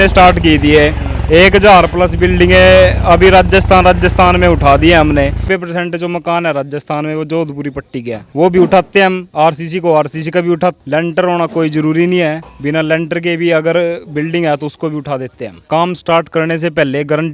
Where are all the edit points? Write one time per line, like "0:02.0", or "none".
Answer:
0:05.4
0:08.2
0:10.8
0:15.6